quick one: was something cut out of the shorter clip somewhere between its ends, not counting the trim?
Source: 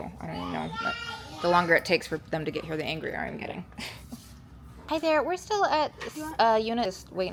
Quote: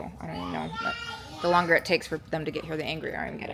no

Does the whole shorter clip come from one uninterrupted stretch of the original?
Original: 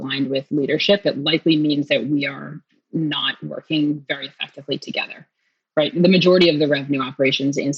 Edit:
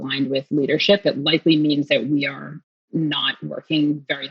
yes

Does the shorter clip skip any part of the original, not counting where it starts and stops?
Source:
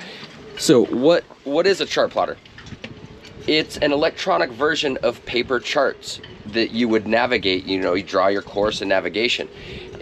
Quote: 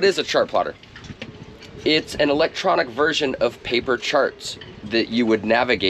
no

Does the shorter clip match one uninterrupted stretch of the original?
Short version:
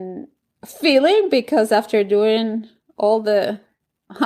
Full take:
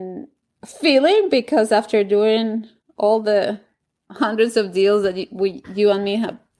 yes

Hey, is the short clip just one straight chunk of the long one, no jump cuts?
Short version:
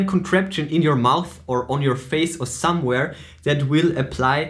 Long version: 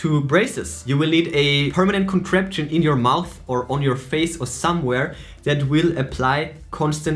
yes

